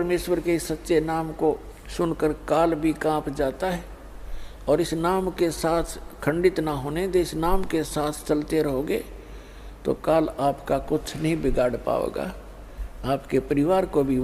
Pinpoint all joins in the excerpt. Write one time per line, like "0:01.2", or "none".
none